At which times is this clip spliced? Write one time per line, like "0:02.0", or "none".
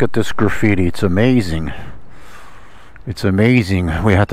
none